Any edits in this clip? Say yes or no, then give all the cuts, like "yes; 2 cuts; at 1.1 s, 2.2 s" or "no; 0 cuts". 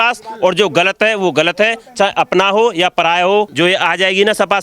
yes; 1 cut; at 3.5 s